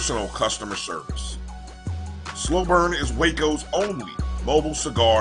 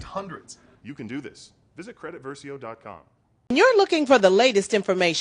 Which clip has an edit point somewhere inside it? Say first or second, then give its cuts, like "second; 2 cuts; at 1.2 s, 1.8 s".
second; 1 cut; at 3.9 s